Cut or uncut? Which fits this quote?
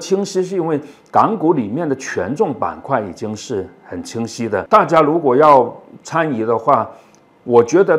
cut